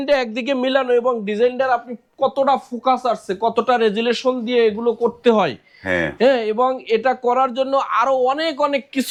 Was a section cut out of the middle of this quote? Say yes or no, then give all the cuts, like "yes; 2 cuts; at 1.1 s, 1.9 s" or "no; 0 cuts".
no; 0 cuts